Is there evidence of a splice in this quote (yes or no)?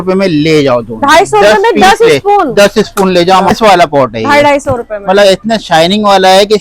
yes